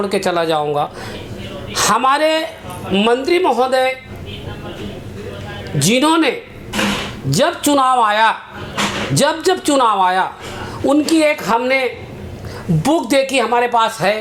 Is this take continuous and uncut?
yes; 0 cuts

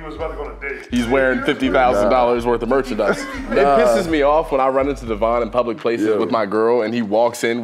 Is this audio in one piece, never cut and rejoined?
no; 1 cut; at 3.5 s

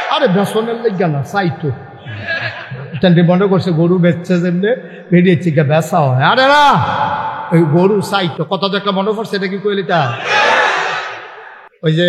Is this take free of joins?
yes; 0 cuts

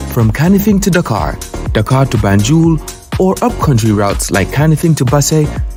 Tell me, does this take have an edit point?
no; 0 cuts

